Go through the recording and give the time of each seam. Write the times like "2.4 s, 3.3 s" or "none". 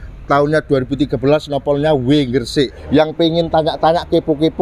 2.8 s